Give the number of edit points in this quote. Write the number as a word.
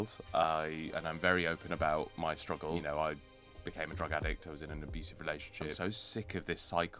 two